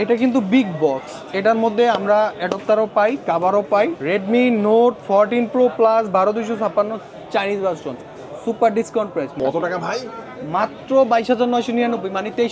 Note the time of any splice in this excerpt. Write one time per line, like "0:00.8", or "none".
0:04.0
0:09.4